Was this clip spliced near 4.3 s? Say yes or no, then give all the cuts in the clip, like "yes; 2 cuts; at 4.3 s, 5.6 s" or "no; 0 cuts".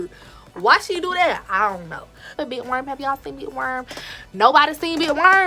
no; 1 cut; at 2.3 s